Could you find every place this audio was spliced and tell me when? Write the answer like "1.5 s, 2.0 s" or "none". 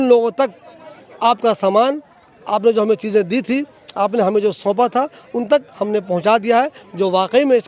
none